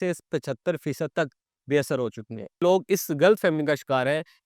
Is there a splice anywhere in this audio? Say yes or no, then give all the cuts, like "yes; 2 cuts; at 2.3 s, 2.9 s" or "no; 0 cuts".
yes; 1 cut; at 2.6 s